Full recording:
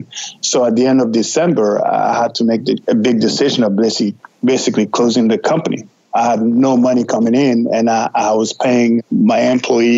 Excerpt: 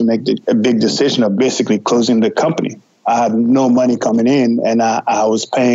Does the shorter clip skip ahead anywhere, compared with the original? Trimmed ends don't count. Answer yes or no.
yes